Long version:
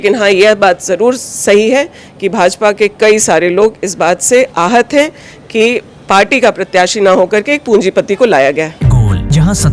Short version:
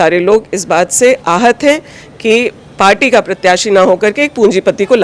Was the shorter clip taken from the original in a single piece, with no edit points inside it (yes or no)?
yes